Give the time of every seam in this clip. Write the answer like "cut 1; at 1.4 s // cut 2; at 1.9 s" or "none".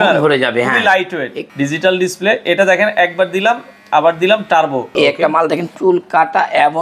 cut 1; at 1.4 s // cut 2; at 4.9 s